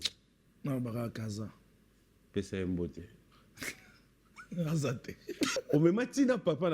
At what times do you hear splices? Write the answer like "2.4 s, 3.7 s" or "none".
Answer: 5.6 s